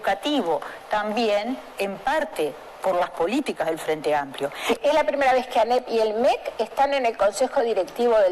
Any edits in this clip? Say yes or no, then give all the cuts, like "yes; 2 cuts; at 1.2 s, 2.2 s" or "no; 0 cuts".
yes; 1 cut; at 4.6 s